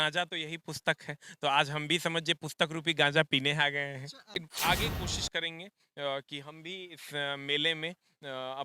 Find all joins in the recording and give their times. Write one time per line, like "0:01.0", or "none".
0:04.3